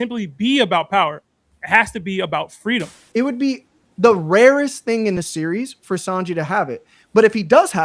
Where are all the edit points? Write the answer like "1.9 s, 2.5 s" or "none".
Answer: 3.0 s